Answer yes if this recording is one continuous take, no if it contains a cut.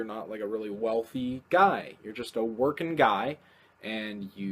no